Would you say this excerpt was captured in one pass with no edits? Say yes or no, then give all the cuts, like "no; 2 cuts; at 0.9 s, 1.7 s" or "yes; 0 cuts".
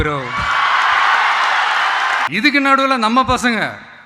no; 1 cut; at 2.3 s